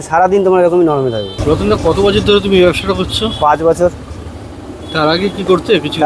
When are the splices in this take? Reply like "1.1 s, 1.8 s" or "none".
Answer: 1.3 s

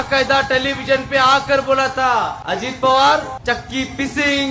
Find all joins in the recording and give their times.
2.4 s, 3.3 s

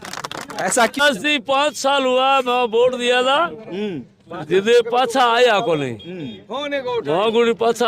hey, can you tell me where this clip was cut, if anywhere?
1.0 s

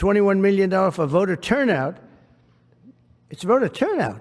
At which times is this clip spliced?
none

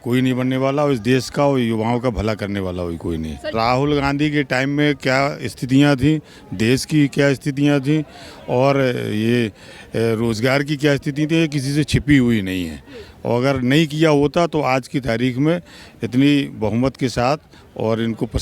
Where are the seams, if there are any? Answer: 3.5 s

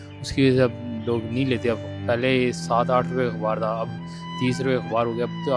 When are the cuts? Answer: none

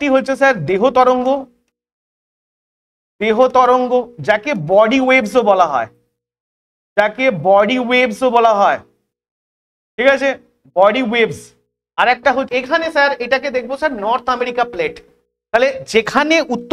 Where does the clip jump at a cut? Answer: 12.5 s

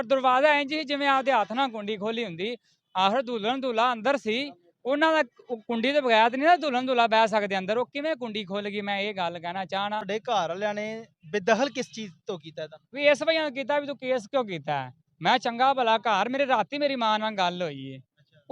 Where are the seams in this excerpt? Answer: 10.1 s

